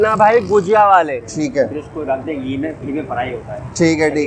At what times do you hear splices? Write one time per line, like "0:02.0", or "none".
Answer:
0:01.2